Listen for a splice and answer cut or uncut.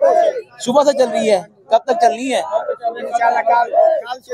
uncut